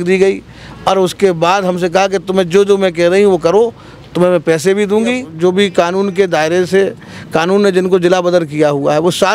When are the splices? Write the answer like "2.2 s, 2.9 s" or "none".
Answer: 5.3 s